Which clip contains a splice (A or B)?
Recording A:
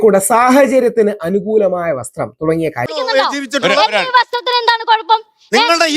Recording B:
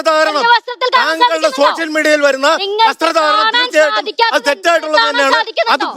A